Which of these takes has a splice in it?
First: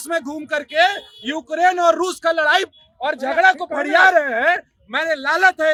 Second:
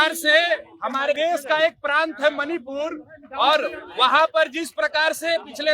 second; 1 cut; at 1.1 s

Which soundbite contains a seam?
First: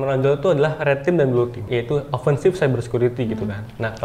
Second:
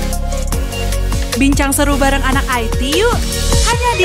first; 1 cut; at 1.6 s

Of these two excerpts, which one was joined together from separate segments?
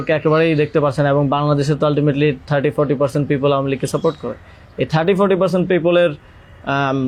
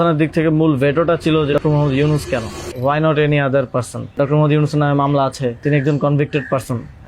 second; 4 cuts; at 1.6 s, 2.6 s, 4.1 s, 5.6 s

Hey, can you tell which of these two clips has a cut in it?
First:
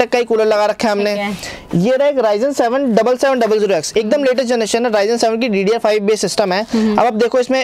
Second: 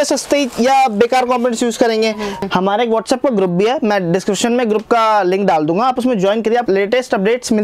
second; 2 cuts; at 2.4 s, 6.6 s

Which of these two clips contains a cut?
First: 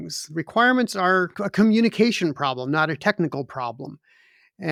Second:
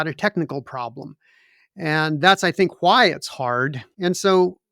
second; 1 cut; at 3.8 s

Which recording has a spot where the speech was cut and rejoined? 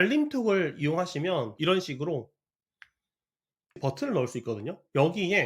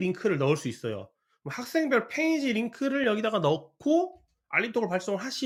first; 1 cut; at 3.8 s

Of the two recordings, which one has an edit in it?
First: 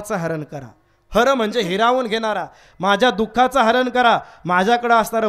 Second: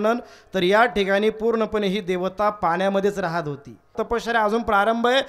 second; 1 cut; at 4.0 s

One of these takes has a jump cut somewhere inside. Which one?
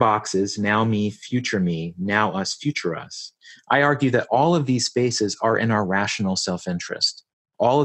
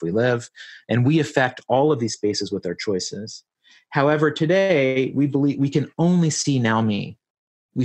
second; 1 cut; at 3.5 s

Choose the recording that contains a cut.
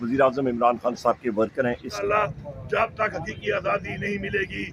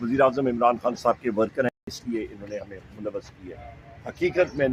first; 1 cut; at 2.0 s

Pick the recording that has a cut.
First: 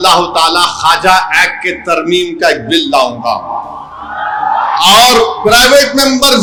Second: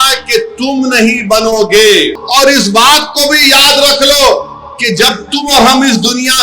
second; 1 cut; at 2.2 s

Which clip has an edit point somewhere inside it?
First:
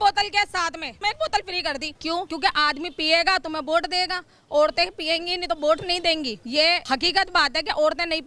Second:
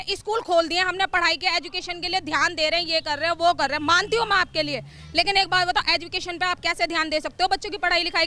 first; 3 cuts; at 0.9 s, 2.3 s, 6.5 s

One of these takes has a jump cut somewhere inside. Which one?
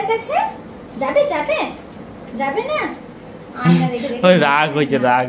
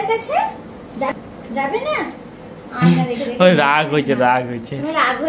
second; 1 cut; at 1.1 s

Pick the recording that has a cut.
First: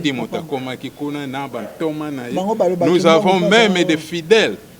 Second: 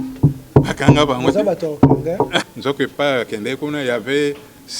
second; 1 cut; at 2.4 s

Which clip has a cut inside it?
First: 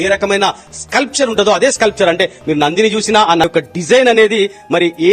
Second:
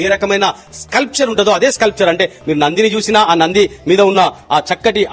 first; 1 cut; at 3.4 s

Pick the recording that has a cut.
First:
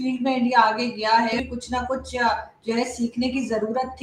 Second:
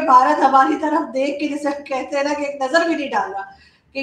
first; 1 cut; at 1.4 s

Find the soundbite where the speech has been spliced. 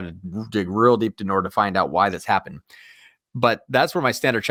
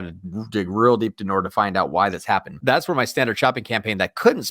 second; 1 cut; at 2.6 s

